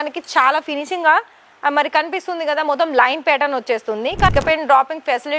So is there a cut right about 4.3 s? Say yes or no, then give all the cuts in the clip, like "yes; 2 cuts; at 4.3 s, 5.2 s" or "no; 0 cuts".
yes; 1 cut; at 4.3 s